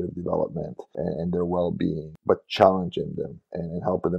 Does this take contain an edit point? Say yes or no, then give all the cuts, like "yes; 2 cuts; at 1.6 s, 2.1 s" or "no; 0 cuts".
yes; 2 cuts; at 1.0 s, 2.1 s